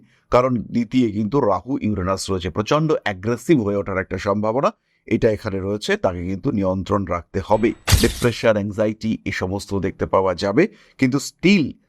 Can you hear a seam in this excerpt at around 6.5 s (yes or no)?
no